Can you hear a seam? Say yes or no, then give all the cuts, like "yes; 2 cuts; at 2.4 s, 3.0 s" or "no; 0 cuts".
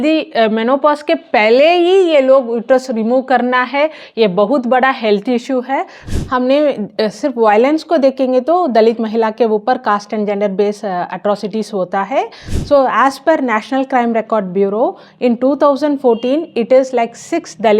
yes; 2 cuts; at 6.0 s, 12.5 s